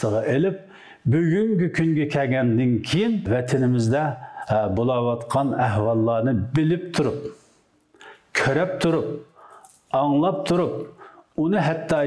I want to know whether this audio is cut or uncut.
cut